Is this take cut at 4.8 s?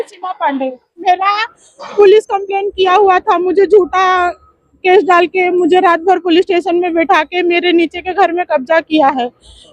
no; 1 cut; at 1.0 s

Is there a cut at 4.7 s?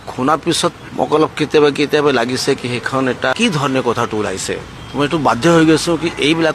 yes; 3 cuts; at 0.8 s, 2.9 s, 4.7 s

